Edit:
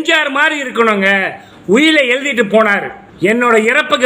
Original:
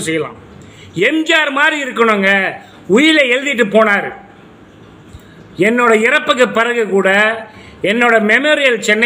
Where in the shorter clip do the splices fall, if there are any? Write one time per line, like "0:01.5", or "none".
0:03.0